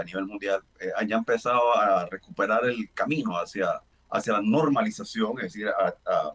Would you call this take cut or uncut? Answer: cut